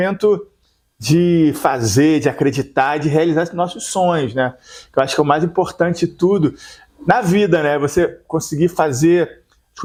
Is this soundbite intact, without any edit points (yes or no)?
yes